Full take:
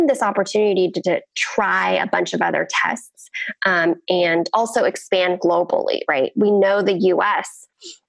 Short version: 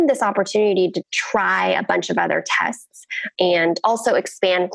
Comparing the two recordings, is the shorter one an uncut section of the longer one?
no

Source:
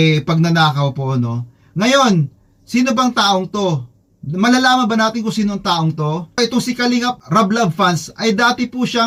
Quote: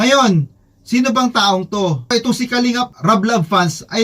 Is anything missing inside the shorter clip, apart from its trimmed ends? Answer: yes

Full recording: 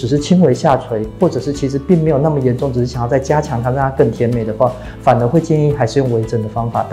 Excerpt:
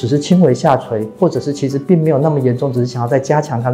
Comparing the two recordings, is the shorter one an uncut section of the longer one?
yes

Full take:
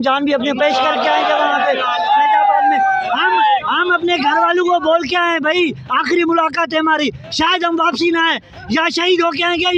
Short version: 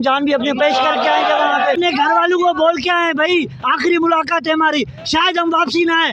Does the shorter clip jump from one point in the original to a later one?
yes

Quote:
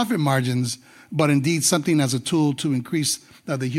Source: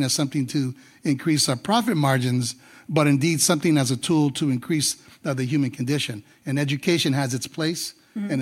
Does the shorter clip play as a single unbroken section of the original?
yes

